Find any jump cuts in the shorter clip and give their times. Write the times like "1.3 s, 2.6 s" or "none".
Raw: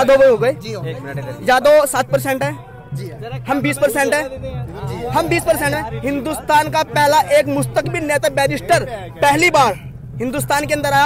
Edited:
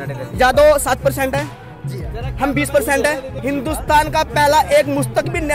3.3 s